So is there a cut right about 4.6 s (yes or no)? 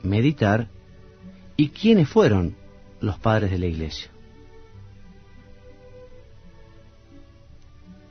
yes